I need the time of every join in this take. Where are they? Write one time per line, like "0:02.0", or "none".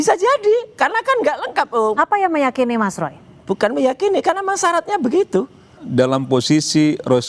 0:05.8